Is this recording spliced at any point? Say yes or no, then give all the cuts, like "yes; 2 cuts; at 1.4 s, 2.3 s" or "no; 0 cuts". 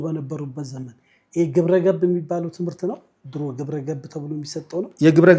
no; 0 cuts